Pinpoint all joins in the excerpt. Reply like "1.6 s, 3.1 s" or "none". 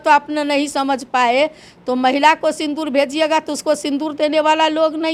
none